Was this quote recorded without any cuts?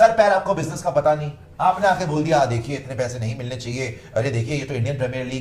yes; 0 cuts

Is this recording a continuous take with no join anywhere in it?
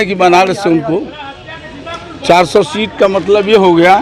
yes; 0 cuts

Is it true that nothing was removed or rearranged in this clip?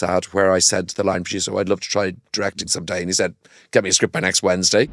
yes; 0 cuts

